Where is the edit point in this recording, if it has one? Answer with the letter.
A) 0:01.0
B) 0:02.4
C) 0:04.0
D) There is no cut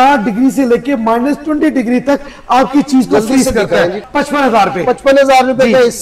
C